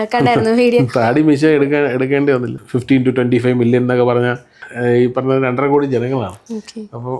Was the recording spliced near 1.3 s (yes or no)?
no